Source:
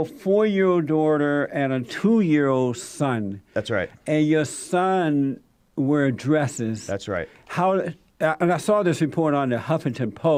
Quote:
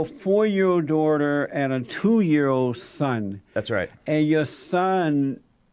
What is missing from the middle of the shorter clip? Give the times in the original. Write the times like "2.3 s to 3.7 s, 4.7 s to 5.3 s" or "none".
none

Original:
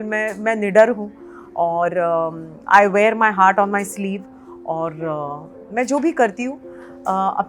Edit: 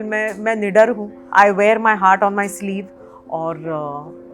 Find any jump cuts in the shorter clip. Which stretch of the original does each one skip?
1.1 s to 2.5 s

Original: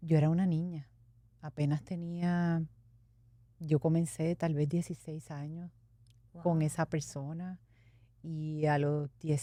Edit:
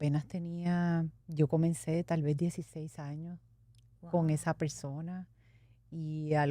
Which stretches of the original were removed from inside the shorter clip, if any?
2.8 s to 3.5 s

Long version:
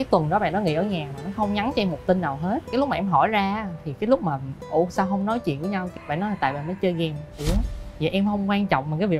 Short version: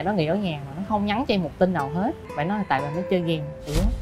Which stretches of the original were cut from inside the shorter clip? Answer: 2.7 s to 5.9 s

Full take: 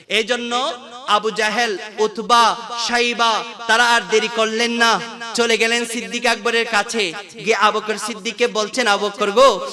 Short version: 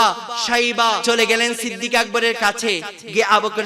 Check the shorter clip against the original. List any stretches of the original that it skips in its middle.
3.4 s to 5.3 s

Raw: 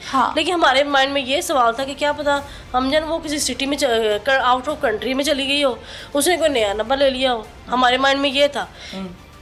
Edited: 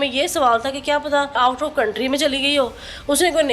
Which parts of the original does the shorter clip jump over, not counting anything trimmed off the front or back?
2.5 s to 4.4 s

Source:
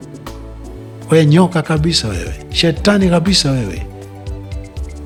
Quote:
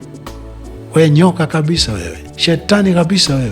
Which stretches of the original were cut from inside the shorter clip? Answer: 0.9 s to 1.1 s

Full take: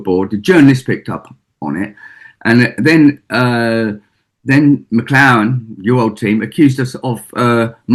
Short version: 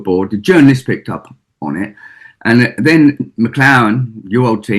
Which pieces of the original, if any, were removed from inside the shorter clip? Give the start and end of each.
3.3 s to 4.8 s

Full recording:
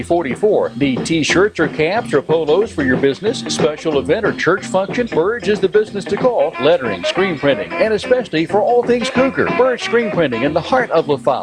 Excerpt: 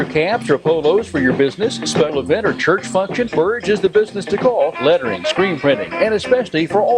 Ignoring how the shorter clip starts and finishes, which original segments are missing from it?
3.8 s to 3.9 s

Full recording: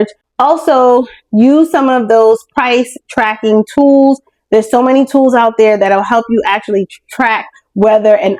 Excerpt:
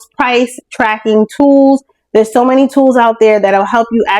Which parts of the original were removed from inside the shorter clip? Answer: none

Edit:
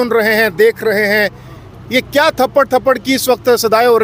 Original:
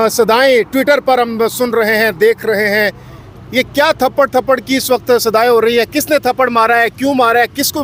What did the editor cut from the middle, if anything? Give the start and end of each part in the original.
none

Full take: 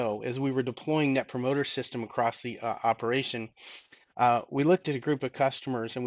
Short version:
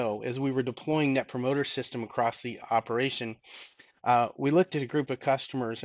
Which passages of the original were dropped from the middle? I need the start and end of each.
2.6 s to 2.8 s

